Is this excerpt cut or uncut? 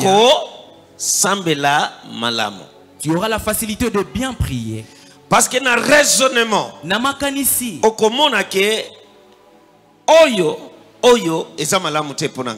uncut